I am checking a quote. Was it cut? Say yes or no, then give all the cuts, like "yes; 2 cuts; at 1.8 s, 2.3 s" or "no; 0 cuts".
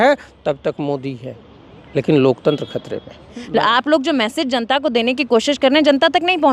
yes; 1 cut; at 3.4 s